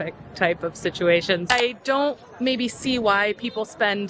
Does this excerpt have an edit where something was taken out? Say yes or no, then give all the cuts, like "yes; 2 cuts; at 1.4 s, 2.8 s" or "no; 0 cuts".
yes; 1 cut; at 1.5 s